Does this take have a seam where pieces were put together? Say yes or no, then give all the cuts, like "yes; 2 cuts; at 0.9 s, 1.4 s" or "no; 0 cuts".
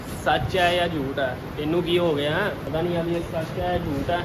yes; 1 cut; at 2.6 s